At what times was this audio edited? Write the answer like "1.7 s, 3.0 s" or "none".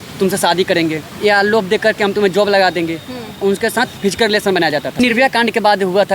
1.1 s, 4.0 s, 5.0 s